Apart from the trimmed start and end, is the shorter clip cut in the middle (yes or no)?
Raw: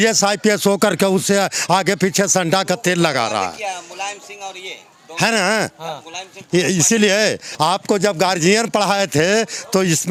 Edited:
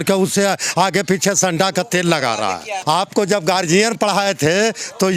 yes